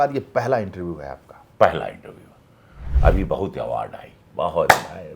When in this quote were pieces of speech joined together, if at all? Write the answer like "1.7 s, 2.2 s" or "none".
2.9 s